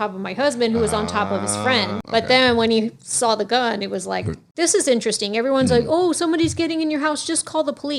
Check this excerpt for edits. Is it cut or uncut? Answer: cut